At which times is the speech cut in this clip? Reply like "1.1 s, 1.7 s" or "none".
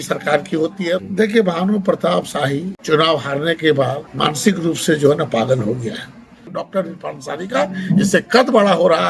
1.0 s, 2.7 s, 4.0 s, 6.5 s